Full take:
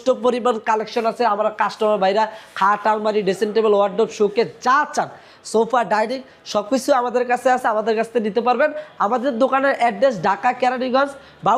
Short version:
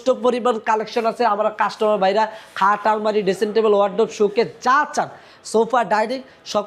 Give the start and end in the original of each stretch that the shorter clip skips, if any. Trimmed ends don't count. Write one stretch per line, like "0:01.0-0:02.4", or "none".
none